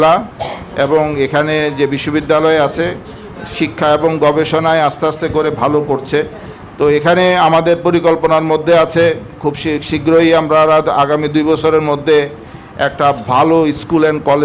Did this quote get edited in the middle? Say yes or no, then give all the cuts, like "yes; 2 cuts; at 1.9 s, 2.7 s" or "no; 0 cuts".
no; 0 cuts